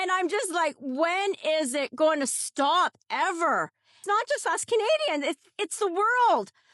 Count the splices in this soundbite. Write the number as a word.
one